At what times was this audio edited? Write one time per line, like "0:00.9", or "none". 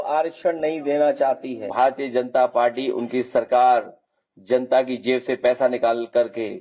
0:01.7